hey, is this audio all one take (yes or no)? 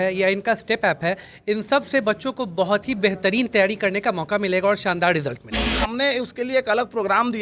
no